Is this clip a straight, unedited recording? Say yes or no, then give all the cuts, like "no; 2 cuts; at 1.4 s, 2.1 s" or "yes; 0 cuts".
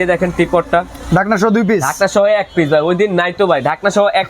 yes; 0 cuts